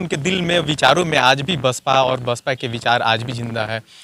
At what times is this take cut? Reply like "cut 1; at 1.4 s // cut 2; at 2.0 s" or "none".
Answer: none